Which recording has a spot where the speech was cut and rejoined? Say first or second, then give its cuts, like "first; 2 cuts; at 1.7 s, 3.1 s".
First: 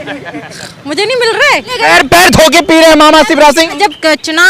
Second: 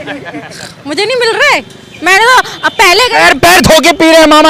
first; 2 cuts; at 1.8 s, 3.8 s